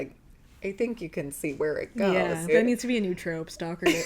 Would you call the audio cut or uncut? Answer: cut